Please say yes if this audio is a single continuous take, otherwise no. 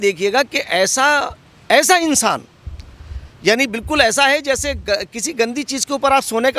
yes